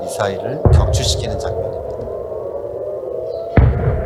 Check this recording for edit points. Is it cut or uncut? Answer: uncut